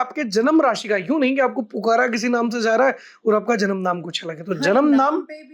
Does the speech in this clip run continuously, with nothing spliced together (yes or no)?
yes